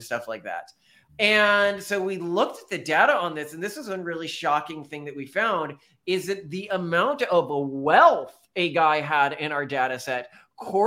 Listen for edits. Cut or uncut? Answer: uncut